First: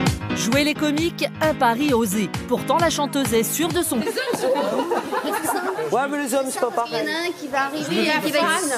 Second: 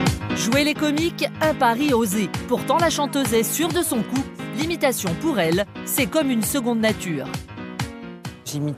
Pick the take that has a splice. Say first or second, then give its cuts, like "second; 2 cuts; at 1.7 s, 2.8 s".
second; 1 cut; at 4.0 s